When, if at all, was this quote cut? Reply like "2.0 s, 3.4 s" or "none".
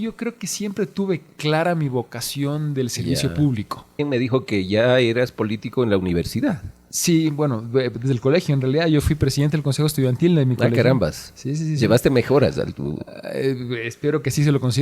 4.0 s